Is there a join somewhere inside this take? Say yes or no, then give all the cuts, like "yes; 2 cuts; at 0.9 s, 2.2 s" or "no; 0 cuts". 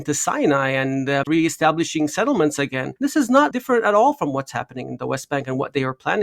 yes; 2 cuts; at 1.2 s, 3.5 s